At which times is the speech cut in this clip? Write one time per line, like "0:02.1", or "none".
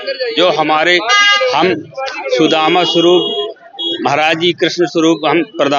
none